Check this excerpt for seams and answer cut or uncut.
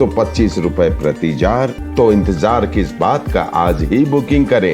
cut